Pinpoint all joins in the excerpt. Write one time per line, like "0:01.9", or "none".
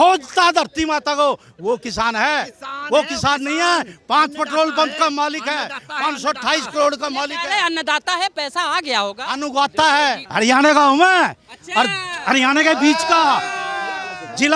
0:10.2